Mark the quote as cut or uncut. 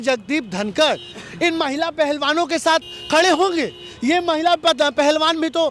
uncut